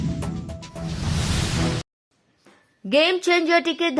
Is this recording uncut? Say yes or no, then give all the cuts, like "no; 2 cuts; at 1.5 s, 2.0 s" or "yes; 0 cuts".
yes; 0 cuts